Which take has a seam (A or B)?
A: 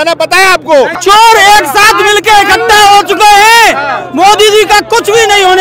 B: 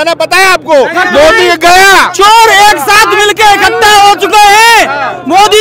A